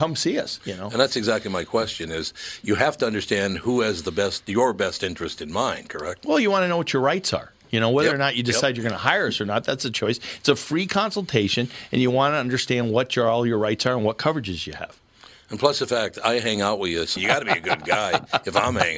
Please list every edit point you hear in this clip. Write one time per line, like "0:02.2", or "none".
none